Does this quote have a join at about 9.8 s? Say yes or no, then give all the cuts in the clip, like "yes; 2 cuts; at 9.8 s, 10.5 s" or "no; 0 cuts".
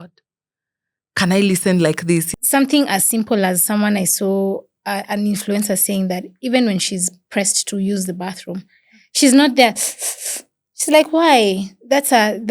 no; 1 cut; at 2.3 s